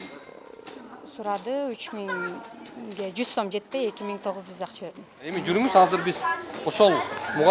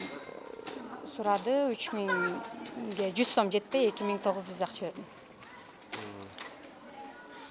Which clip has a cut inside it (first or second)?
first